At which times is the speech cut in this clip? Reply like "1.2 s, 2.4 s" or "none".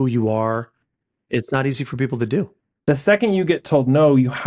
2.7 s